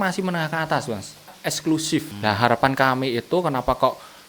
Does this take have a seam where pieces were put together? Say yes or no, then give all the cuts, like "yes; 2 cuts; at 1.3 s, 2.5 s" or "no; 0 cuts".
yes; 2 cuts; at 1.3 s, 2.1 s